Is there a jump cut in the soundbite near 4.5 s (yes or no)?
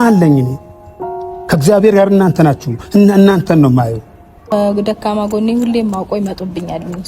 yes